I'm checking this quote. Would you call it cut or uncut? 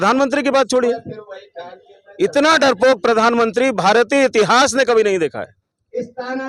uncut